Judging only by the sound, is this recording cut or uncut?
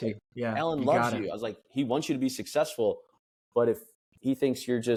uncut